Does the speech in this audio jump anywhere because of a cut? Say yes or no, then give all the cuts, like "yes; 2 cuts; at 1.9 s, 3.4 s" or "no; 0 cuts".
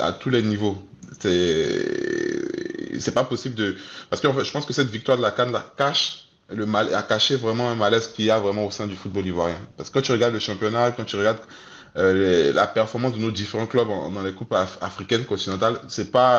no; 0 cuts